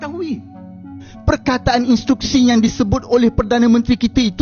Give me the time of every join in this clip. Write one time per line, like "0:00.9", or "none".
0:00.9